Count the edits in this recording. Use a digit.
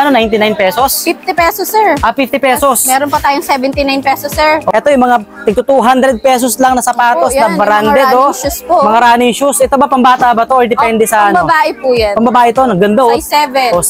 1